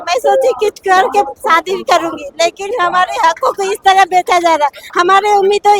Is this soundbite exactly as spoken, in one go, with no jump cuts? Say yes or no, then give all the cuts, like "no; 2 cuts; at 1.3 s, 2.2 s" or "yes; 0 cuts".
yes; 0 cuts